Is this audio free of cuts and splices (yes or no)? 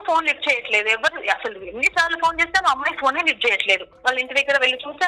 no